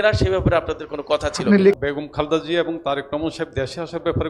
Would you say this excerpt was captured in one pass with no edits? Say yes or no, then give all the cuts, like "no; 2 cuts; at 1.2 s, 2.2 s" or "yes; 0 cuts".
no; 1 cut; at 1.7 s